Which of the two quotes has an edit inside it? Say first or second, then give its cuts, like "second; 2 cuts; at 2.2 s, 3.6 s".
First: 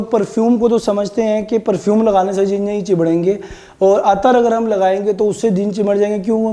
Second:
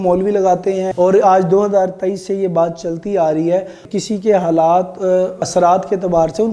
second; 2 cuts; at 0.9 s, 3.9 s